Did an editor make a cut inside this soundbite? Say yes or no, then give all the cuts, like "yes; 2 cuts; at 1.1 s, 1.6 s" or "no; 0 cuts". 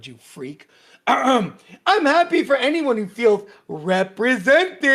no; 0 cuts